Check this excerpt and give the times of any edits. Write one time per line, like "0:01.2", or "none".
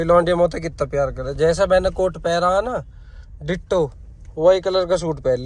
none